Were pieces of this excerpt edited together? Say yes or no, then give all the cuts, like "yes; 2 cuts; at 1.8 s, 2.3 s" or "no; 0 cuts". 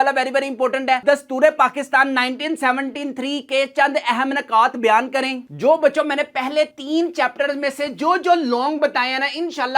yes; 2 cuts; at 1.0 s, 5.4 s